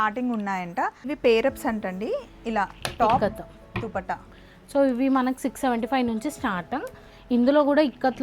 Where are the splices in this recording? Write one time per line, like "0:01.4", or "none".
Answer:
0:01.0